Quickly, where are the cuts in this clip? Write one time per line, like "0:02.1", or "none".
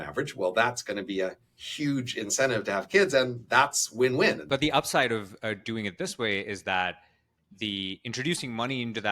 0:04.4